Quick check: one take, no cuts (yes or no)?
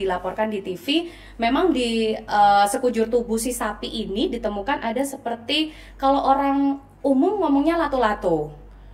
yes